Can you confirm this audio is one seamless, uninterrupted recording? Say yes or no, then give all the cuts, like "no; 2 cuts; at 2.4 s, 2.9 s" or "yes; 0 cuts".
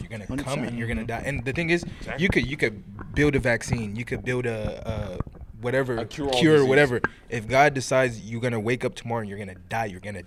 yes; 0 cuts